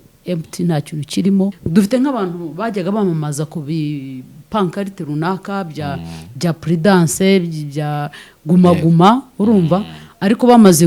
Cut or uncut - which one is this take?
cut